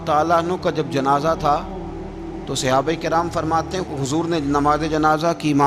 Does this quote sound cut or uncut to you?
uncut